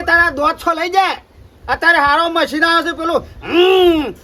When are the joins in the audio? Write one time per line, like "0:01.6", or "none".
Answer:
none